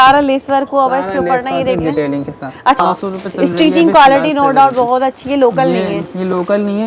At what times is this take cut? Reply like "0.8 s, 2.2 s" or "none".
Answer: 2.8 s